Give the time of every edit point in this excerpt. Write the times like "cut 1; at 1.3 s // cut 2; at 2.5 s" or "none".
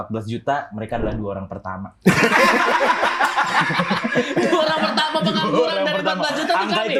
none